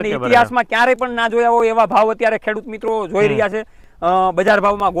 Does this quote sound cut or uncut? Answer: uncut